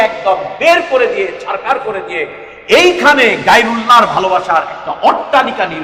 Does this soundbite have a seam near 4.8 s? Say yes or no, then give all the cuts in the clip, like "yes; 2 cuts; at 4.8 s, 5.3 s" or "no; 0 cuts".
no; 0 cuts